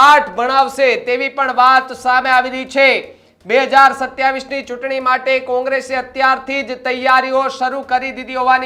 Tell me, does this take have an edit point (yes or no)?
no